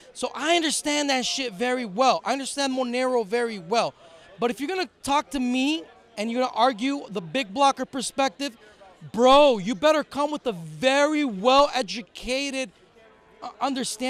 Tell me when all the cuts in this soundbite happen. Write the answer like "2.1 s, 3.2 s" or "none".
none